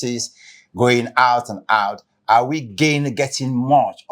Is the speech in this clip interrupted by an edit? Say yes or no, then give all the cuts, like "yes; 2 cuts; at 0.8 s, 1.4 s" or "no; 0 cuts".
no; 0 cuts